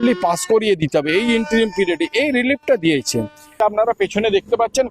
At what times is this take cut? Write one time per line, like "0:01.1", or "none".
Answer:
0:03.6